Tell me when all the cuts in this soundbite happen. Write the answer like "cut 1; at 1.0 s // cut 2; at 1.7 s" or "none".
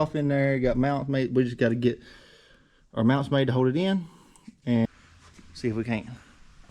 cut 1; at 4.9 s